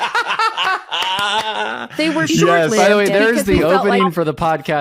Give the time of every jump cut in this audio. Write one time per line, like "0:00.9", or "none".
none